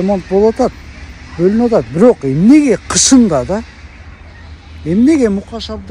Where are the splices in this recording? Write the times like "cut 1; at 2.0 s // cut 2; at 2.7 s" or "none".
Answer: none